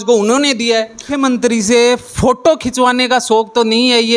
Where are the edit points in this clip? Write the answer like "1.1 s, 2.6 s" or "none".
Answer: 1.2 s